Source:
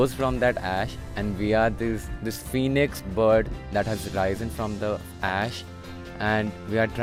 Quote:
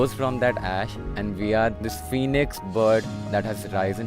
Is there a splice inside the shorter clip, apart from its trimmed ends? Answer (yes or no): yes